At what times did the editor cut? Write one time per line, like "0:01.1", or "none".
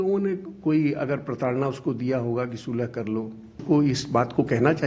0:03.6